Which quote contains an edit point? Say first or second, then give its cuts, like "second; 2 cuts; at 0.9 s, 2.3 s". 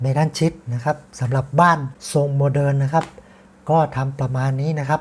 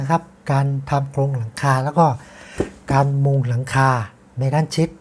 first; 1 cut; at 1.9 s